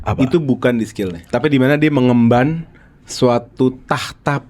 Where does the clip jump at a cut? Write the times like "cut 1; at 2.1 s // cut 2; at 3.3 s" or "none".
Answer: cut 1; at 1.2 s